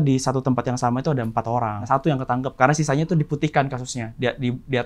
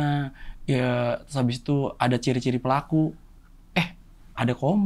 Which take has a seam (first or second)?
first